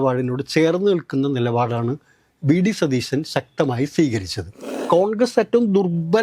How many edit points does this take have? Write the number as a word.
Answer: one